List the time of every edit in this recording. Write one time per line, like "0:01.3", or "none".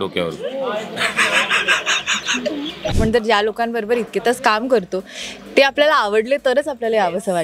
0:03.0

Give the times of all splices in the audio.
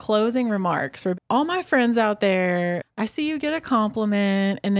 0:01.1
0:02.9

